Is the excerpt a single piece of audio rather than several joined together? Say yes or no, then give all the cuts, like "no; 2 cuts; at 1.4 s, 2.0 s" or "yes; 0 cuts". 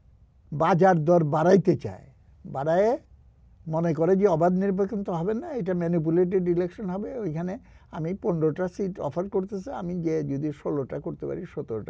yes; 0 cuts